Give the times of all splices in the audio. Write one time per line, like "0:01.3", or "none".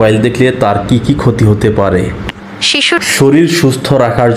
0:03.0